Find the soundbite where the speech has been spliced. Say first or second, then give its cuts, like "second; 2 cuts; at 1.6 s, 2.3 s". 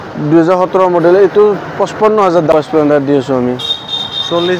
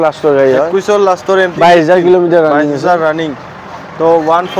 first; 1 cut; at 2.5 s